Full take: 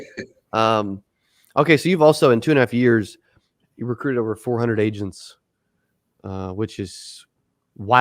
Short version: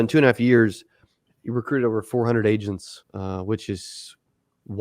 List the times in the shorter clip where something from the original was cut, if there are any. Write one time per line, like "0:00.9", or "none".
0:03.0